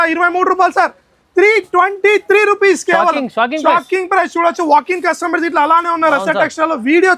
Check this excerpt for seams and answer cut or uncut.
uncut